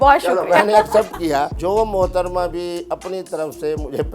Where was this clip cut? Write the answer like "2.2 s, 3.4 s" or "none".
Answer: 1.5 s